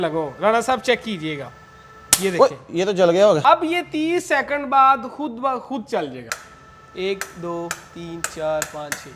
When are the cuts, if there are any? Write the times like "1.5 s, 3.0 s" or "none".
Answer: 3.4 s, 6.2 s